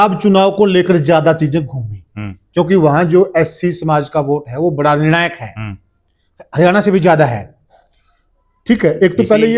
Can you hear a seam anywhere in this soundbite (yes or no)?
no